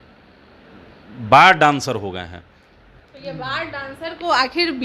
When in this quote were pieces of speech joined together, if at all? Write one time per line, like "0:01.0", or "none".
0:02.9

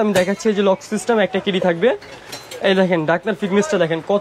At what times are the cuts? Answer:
none

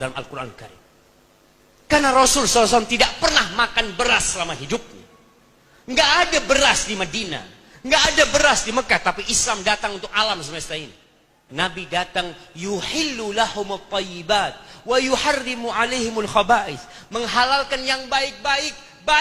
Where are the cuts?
0:11.4

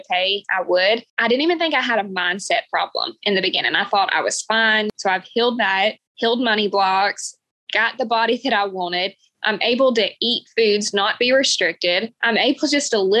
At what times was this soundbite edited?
0:04.9
0:06.1

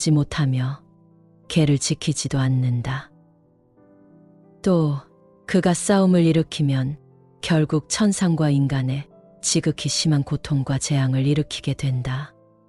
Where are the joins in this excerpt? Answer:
none

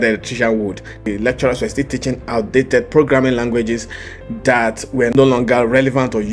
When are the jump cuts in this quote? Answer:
0:01.0
0:05.1

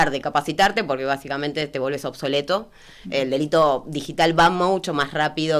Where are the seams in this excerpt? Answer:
none

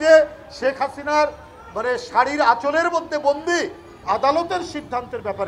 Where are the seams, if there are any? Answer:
0:04.0

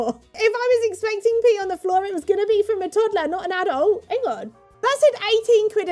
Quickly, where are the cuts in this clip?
0:04.0

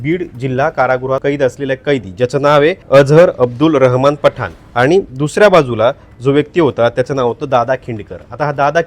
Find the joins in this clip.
0:01.2
0:02.8
0:04.6

